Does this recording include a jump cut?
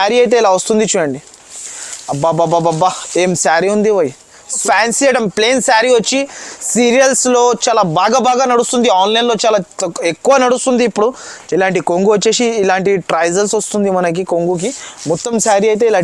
yes; 2 cuts; at 4.6 s, 11.3 s

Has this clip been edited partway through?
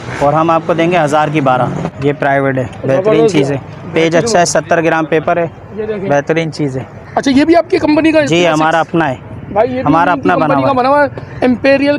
yes; 2 cuts; at 1.9 s, 7.0 s

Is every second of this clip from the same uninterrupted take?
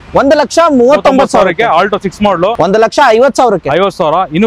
no; 1 cut; at 2.5 s

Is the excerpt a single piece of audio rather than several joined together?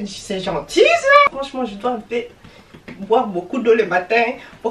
no; 1 cut; at 1.3 s

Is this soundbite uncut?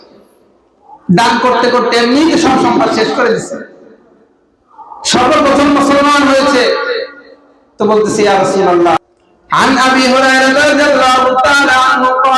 no; 1 cut; at 9.0 s

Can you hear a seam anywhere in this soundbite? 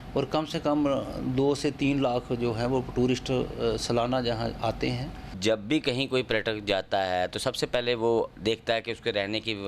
yes; 1 cut; at 5.3 s

